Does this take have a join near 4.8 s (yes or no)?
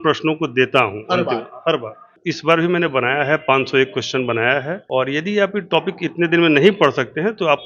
yes